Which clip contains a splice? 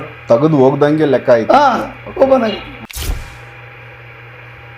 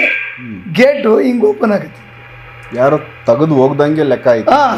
first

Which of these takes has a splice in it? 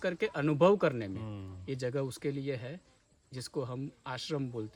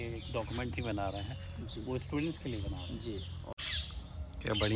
second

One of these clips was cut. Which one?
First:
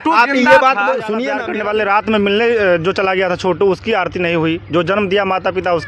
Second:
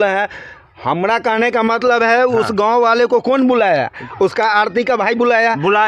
first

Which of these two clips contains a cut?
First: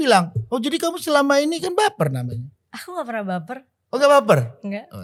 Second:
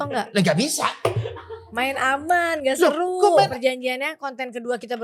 second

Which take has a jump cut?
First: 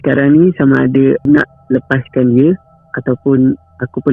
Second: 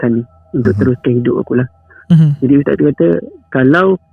first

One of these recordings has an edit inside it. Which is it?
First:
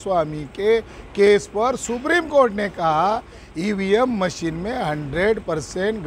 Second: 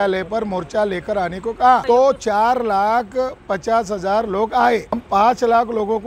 second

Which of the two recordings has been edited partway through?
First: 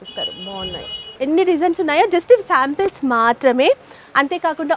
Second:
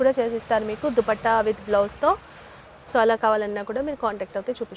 first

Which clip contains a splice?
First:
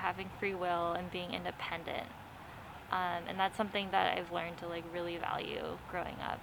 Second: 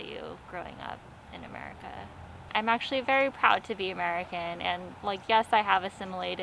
second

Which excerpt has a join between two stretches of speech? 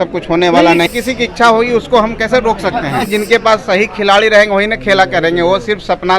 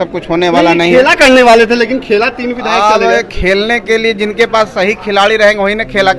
first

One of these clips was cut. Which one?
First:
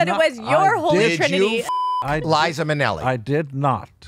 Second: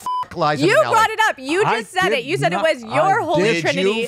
second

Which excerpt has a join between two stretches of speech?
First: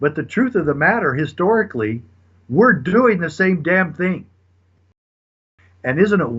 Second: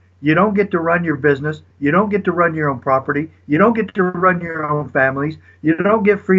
first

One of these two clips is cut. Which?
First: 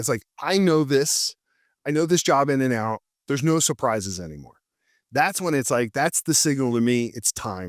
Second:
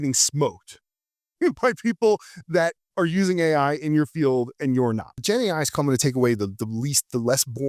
second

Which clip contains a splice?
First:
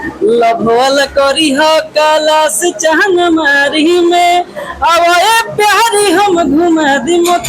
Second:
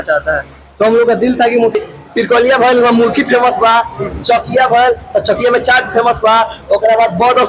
second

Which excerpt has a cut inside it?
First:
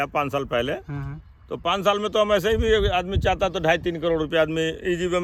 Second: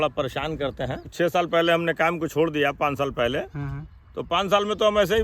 second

